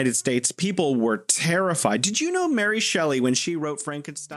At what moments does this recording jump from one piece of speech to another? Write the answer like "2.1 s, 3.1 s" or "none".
none

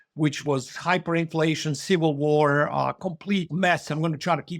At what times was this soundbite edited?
3.5 s

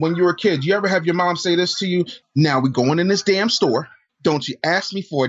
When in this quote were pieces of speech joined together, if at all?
2.2 s, 4.0 s

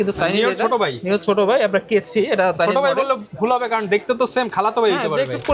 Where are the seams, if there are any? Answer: none

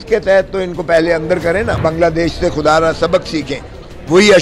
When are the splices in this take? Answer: 1.8 s

